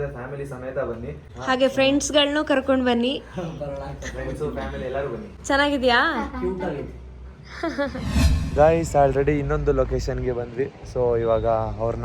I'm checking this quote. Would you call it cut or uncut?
cut